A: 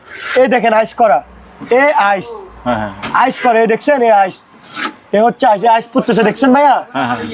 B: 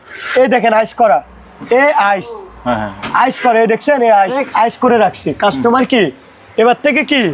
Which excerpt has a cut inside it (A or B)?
B